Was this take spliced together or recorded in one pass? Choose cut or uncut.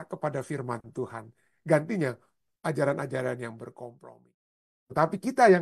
cut